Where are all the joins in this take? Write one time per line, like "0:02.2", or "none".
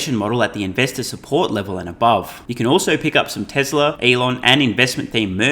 0:02.4
0:04.0

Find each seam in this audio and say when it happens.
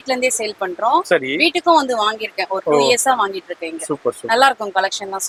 none

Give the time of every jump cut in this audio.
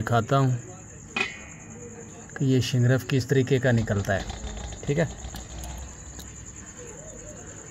none

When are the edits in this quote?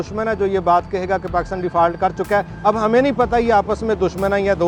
none

